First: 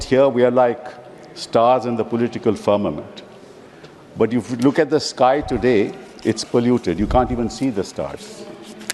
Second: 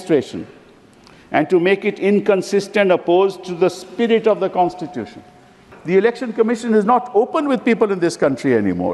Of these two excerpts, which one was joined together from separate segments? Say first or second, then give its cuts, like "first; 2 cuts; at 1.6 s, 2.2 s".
second; 1 cut; at 5.7 s